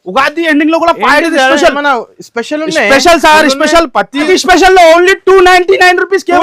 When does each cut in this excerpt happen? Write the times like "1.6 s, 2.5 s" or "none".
4.3 s